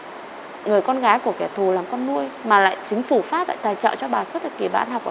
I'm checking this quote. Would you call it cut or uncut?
uncut